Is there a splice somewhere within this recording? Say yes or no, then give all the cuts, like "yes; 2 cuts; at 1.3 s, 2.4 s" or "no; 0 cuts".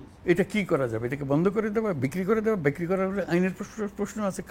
no; 0 cuts